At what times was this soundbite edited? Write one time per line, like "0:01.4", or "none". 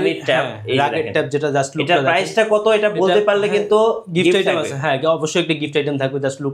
none

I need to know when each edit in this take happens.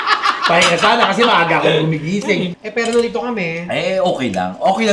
0:02.6

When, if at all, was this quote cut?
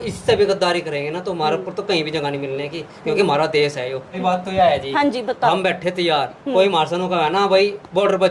0:04.2

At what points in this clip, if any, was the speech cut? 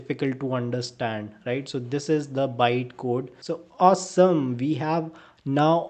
0:03.3

